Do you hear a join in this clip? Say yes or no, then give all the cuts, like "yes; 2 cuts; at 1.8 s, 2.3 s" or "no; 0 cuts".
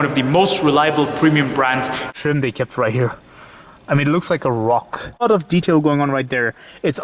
yes; 2 cuts; at 2.1 s, 5.2 s